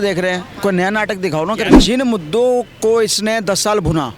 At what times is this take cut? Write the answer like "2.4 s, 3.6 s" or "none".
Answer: 1.7 s